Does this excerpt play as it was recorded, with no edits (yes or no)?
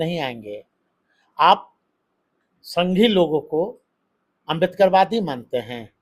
yes